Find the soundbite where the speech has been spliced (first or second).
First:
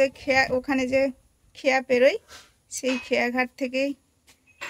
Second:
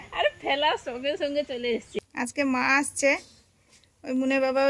second